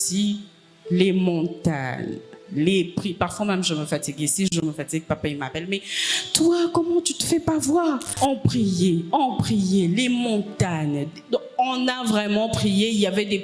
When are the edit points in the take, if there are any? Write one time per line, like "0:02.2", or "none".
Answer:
0:08.1